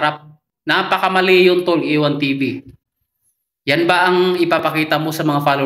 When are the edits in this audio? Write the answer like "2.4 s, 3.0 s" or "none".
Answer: none